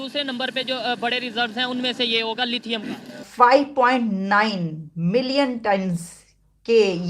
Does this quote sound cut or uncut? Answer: cut